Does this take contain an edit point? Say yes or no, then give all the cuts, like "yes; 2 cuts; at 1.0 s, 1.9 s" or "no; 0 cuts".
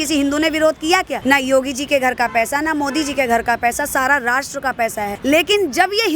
yes; 2 cuts; at 1.1 s, 5.1 s